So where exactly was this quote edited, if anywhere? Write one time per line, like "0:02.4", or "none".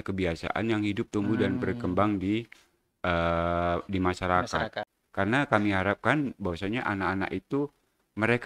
0:04.8